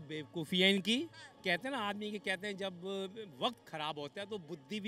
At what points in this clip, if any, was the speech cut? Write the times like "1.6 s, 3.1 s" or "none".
none